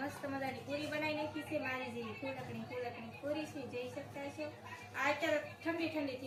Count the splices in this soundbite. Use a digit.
0